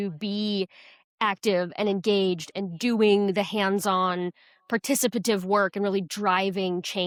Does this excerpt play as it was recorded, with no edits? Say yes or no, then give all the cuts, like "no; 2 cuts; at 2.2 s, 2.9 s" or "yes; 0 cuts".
yes; 0 cuts